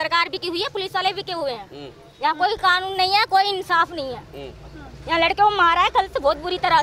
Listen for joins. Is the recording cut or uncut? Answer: uncut